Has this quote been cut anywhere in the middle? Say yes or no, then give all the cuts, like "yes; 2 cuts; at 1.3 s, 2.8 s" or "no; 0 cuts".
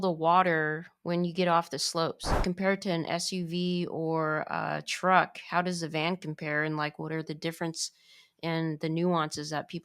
yes; 1 cut; at 2.4 s